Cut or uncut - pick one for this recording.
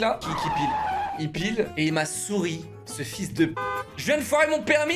cut